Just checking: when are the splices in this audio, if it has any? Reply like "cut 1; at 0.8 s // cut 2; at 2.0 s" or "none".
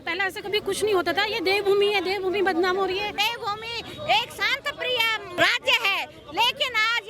cut 1; at 3.1 s // cut 2; at 5.4 s

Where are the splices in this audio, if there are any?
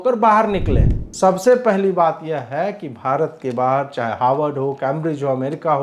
cut 1; at 1.0 s

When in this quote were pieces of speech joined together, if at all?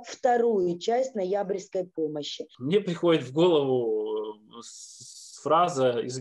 cut 1; at 2.5 s

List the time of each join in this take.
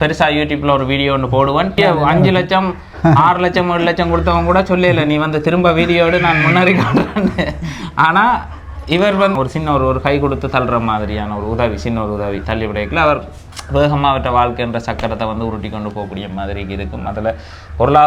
cut 1; at 1.8 s // cut 2; at 9.3 s

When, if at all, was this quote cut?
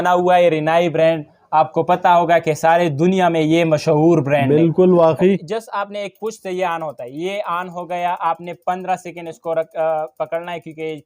cut 1; at 5.5 s

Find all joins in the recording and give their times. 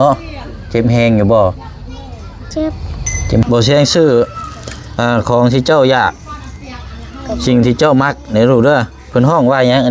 cut 1; at 3.5 s

